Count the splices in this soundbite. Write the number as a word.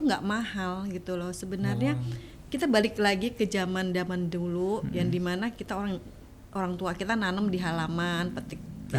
zero